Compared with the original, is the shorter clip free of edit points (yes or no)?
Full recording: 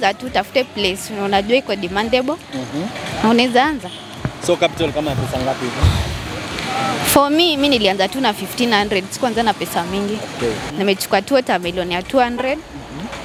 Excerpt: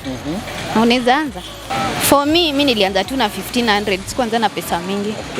no